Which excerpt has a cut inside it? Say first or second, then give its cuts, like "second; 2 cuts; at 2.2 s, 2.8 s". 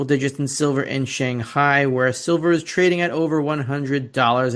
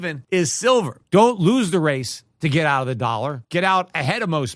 second; 2 cuts; at 1.0 s, 3.4 s